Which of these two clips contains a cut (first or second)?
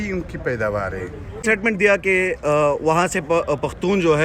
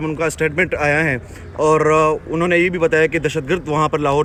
first